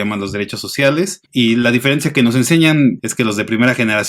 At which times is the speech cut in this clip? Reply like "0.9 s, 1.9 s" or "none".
1.2 s, 3.0 s